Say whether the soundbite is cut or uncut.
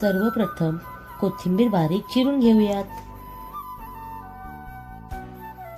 uncut